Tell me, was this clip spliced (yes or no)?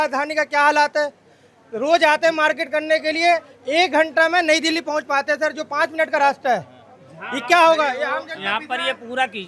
no